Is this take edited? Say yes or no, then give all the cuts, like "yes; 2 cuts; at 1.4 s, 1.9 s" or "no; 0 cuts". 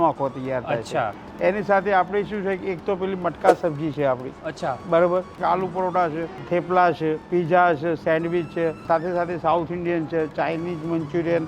yes; 5 cuts; at 1.2 s, 5.3 s, 6.3 s, 7.2 s, 8.8 s